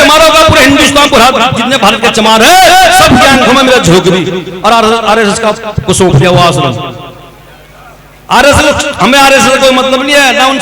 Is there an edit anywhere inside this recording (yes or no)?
no